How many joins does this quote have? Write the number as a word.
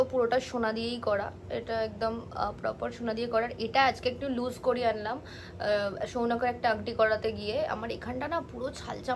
zero